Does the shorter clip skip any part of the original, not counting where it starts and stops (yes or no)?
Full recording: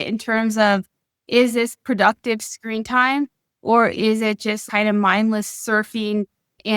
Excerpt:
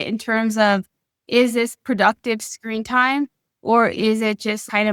no